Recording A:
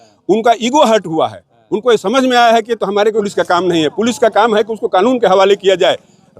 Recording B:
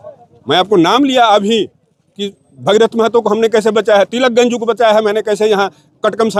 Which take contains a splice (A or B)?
A